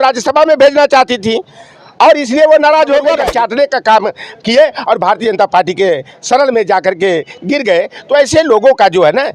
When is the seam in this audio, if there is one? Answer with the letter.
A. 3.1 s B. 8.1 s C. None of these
A